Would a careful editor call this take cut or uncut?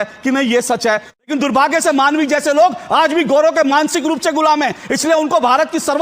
cut